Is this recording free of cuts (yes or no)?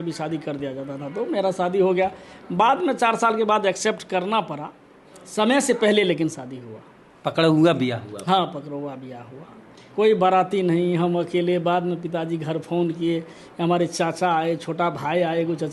yes